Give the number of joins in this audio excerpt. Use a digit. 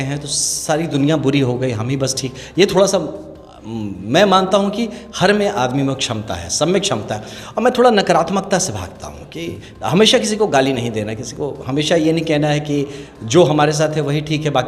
0